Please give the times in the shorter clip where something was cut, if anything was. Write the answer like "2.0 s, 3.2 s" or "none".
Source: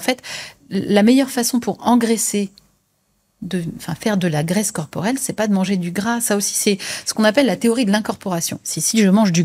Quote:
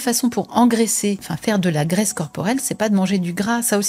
1.3 s